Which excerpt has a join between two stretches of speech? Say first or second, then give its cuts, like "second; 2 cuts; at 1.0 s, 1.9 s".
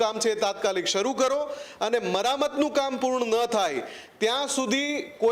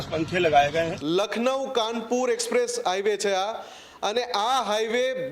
second; 1 cut; at 1.0 s